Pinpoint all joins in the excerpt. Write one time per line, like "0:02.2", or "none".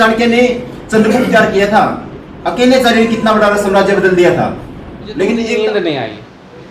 0:05.4